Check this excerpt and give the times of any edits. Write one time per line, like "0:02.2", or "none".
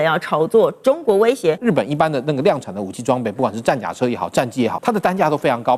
0:01.6
0:04.8